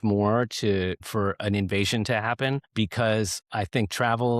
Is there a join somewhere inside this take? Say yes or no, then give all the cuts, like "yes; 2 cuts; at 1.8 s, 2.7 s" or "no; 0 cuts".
yes; 2 cuts; at 1.0 s, 2.7 s